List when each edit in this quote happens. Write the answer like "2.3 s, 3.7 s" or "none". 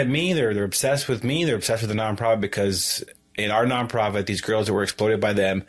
none